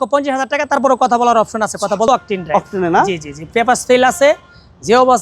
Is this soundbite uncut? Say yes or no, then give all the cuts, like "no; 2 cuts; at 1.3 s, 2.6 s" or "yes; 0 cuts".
no; 1 cut; at 2.1 s